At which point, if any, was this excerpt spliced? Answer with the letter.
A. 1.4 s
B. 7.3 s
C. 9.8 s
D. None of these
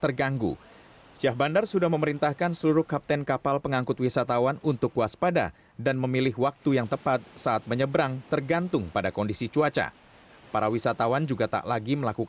A